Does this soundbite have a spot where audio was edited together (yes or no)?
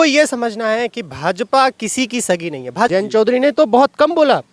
yes